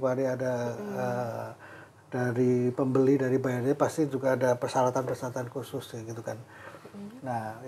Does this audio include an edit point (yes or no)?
no